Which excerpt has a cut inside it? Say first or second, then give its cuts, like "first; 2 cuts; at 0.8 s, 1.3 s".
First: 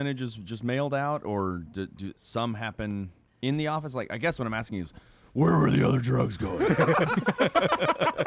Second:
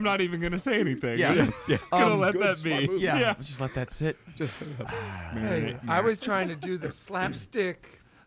first; 1 cut; at 3.2 s